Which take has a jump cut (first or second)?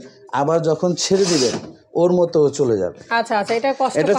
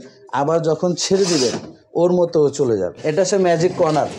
second